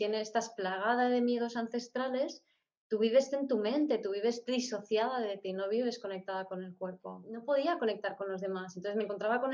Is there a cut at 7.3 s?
yes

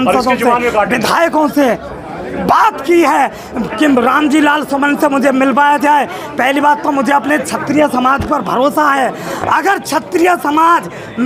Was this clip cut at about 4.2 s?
no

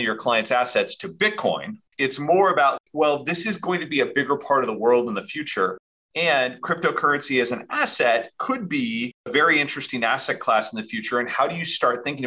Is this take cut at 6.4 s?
no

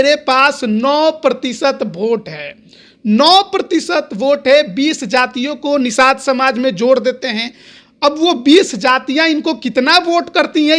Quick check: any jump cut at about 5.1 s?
no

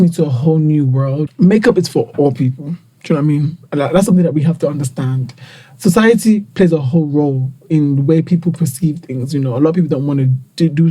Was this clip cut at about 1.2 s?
yes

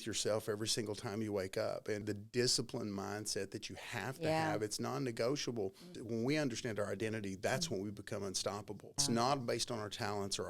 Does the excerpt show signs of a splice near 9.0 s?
yes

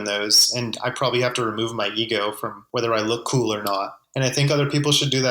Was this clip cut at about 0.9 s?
no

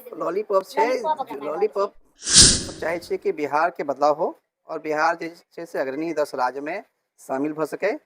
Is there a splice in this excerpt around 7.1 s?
no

